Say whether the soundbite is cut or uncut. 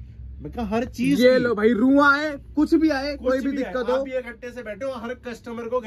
uncut